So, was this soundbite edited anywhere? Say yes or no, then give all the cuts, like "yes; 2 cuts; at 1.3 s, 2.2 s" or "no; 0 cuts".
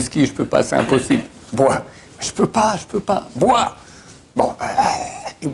no; 0 cuts